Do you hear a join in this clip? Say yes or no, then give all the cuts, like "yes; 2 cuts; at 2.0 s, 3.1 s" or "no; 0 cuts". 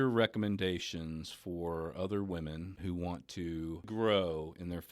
yes; 2 cuts; at 2.7 s, 3.9 s